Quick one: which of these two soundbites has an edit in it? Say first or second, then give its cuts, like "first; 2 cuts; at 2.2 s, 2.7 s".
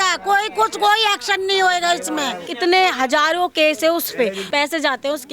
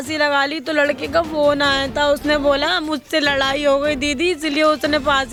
first; 2 cuts; at 2.5 s, 4.4 s